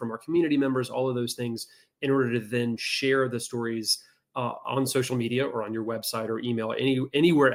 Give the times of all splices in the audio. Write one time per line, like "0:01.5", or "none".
none

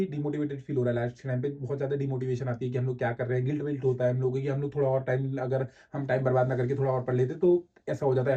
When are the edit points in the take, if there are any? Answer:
none

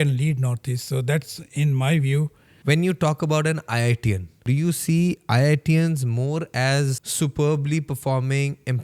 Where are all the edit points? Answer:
0:02.5
0:04.4
0:07.0

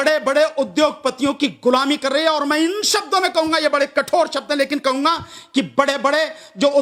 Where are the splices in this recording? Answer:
none

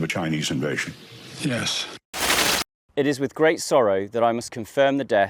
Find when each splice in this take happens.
0:02.2

